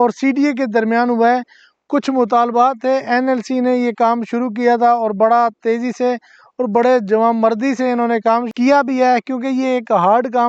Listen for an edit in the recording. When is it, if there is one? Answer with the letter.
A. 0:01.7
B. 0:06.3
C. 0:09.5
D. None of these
D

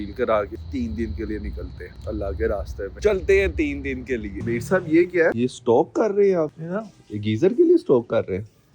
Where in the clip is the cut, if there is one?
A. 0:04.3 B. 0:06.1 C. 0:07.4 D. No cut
A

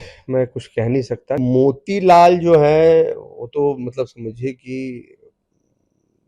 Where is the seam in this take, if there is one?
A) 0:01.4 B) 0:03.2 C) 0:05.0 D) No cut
A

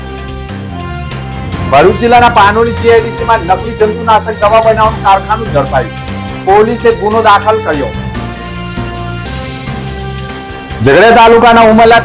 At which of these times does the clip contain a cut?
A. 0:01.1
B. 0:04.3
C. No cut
A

